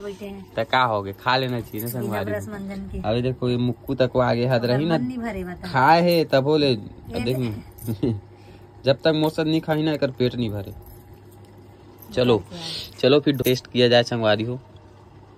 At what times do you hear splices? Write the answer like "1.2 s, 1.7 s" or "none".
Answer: 13.4 s

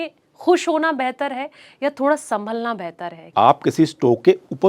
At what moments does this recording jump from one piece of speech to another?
3.3 s

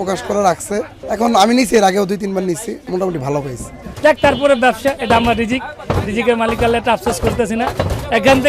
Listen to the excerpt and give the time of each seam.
1.0 s, 2.8 s, 3.8 s

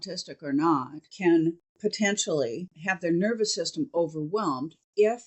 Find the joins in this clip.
1.0 s, 1.7 s, 2.7 s

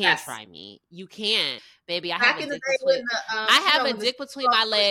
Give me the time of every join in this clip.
1.7 s

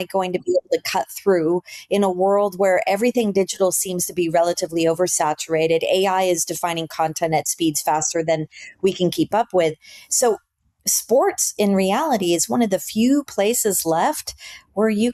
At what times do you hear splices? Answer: none

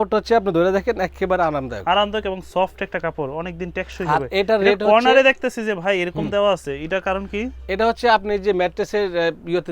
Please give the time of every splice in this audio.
none

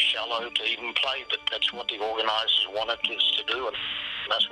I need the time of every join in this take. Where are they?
none

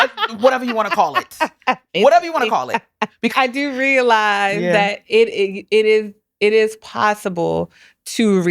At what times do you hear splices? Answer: 3.3 s

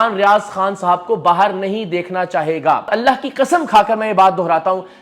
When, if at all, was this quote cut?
2.9 s

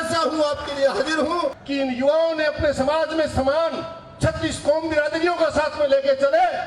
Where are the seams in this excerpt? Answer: 1.6 s

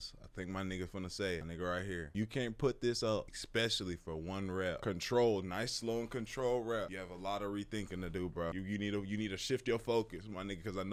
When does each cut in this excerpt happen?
none

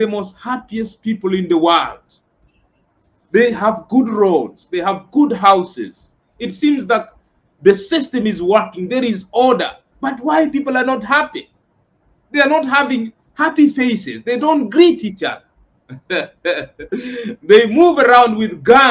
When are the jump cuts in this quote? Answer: 17.1 s

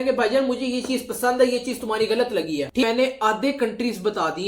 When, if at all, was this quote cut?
2.8 s

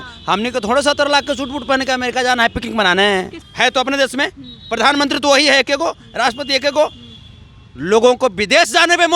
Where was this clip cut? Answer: 3.4 s

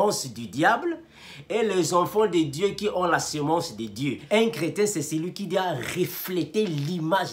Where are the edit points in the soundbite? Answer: 4.2 s

